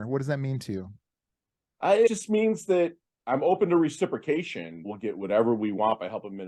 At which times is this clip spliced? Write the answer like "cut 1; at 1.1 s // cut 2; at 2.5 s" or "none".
cut 1; at 2.1 s // cut 2; at 4.9 s